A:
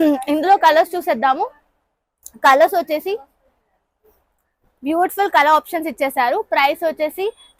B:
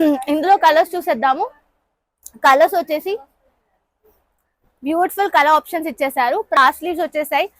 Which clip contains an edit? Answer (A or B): B